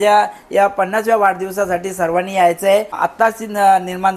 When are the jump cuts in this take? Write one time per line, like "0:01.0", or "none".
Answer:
0:03.0